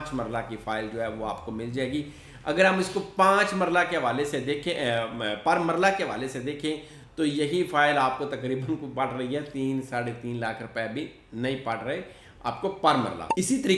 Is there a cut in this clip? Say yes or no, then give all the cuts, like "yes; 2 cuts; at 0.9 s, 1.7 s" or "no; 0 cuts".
no; 0 cuts